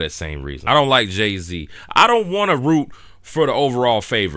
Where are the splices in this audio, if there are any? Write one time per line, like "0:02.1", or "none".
none